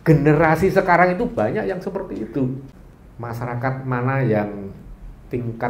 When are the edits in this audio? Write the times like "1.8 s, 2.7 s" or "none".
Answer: 2.7 s